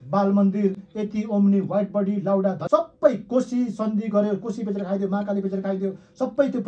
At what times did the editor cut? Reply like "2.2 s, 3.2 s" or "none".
2.6 s